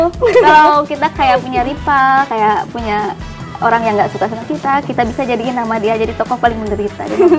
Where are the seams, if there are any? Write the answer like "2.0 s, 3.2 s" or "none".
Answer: none